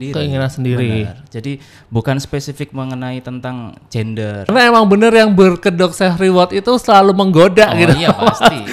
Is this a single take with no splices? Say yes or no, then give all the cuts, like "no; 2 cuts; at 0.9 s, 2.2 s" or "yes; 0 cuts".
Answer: no; 1 cut; at 4.5 s